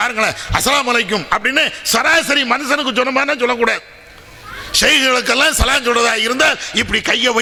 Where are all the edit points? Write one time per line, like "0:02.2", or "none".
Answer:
none